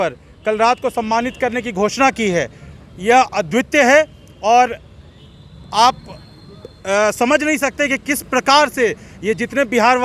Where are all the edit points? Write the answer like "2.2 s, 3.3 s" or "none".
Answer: none